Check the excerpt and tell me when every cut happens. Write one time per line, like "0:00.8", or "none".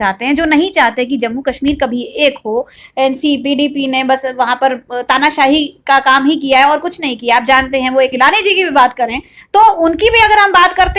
0:02.8
0:08.1